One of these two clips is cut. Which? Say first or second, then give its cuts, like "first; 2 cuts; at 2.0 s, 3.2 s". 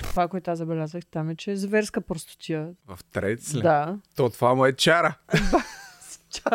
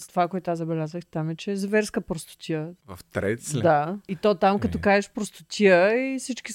first; 1 cut; at 4.0 s